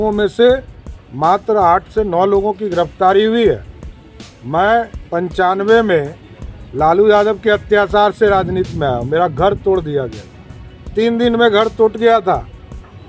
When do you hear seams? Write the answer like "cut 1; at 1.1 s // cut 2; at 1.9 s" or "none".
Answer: none